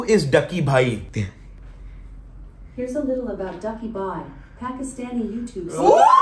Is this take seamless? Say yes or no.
yes